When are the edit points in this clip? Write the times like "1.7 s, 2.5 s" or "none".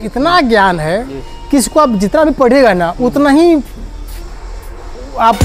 none